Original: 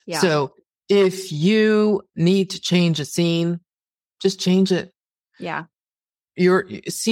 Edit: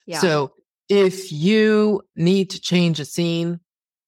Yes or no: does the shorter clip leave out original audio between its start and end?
no